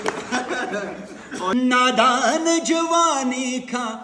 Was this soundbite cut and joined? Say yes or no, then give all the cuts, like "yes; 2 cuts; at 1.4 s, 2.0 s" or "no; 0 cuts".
yes; 1 cut; at 1.5 s